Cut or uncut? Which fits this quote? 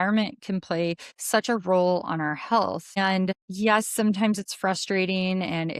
cut